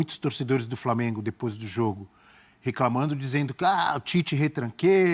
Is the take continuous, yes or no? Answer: yes